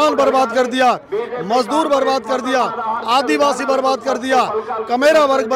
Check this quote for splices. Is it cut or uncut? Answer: uncut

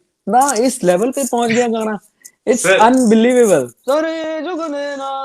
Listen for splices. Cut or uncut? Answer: cut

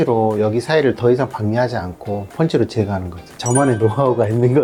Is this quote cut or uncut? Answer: uncut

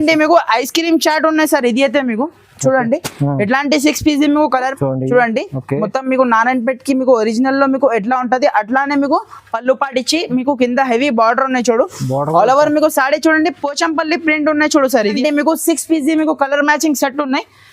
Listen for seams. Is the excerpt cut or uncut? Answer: cut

